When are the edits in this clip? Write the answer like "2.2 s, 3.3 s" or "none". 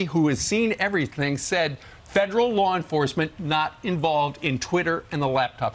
none